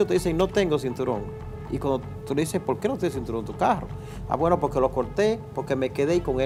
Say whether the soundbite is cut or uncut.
uncut